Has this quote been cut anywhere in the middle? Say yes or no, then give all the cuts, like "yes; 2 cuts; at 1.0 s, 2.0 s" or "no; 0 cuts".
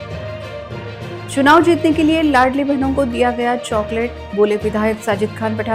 yes; 1 cut; at 1.0 s